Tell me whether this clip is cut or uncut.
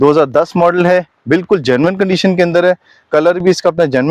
uncut